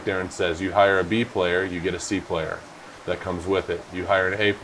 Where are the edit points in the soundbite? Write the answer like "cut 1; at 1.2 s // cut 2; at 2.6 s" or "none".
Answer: none